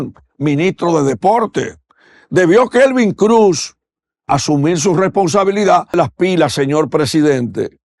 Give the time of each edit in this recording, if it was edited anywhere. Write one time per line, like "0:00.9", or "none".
0:06.0